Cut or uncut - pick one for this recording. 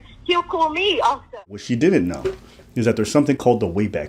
cut